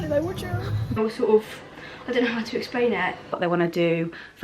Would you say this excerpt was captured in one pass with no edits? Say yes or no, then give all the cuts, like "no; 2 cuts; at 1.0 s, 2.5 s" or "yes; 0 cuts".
no; 2 cuts; at 1.0 s, 3.4 s